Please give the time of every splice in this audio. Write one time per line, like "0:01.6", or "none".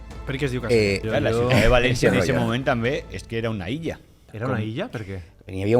0:01.0
0:04.3